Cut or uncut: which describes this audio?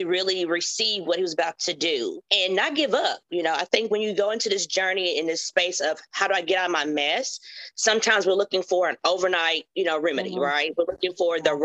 cut